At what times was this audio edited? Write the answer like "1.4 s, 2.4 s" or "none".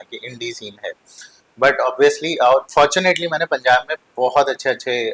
none